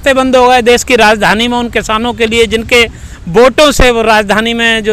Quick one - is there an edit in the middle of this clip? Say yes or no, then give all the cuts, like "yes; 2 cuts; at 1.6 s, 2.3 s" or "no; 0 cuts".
no; 0 cuts